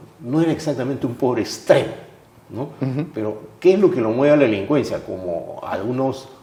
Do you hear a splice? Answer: no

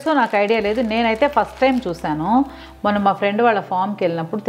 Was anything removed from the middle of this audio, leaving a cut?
no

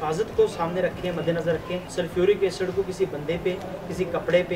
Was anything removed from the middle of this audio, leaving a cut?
yes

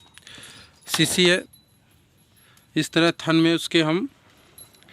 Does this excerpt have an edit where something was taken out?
yes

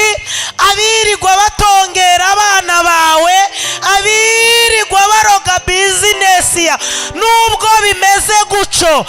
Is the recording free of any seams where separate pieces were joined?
yes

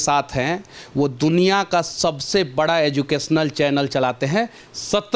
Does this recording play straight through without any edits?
yes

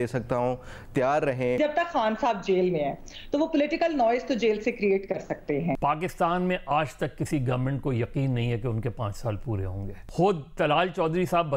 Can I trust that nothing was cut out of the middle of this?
no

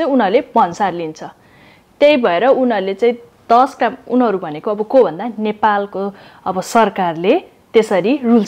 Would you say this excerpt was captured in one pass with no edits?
yes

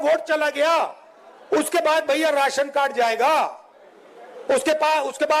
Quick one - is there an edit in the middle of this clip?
no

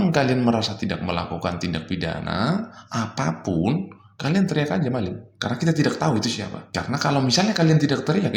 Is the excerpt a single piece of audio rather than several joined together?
yes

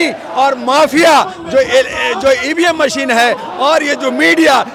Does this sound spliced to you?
no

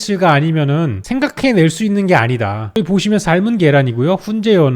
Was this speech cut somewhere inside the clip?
no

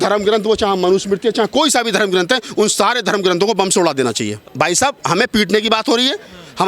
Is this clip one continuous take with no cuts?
no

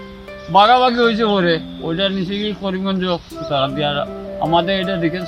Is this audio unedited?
yes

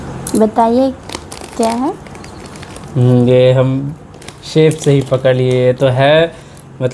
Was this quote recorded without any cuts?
yes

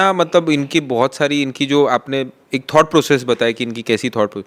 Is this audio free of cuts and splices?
yes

